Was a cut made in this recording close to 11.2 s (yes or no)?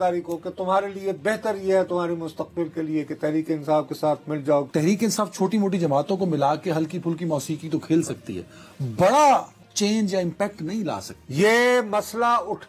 yes